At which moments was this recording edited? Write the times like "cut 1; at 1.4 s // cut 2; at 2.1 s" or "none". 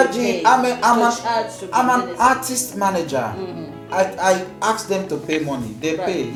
none